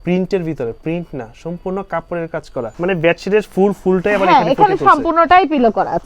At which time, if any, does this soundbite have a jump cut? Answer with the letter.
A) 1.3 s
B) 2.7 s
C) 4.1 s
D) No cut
B